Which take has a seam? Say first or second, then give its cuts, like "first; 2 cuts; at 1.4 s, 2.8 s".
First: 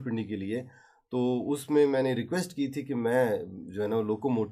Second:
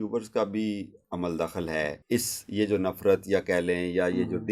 second; 1 cut; at 2.0 s